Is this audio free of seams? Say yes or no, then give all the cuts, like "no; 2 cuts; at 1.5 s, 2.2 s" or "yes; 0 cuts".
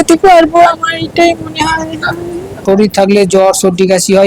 no; 1 cut; at 2.6 s